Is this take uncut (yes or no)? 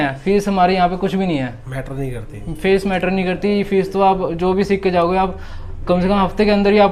yes